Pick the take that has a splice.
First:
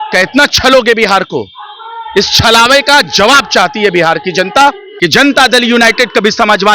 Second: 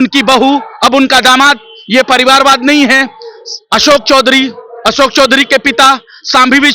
first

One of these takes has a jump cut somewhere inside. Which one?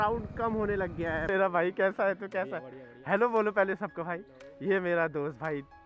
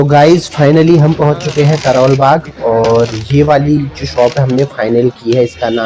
first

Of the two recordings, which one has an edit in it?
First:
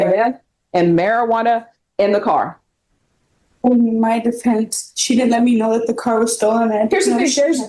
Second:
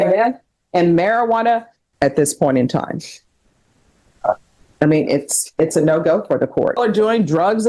second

